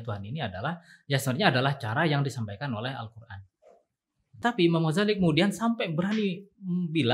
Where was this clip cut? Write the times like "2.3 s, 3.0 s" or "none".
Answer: 4.4 s